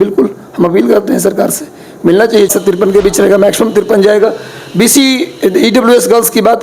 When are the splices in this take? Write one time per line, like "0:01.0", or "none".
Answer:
0:02.5